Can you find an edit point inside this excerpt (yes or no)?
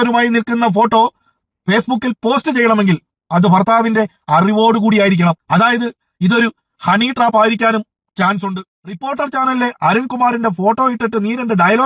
yes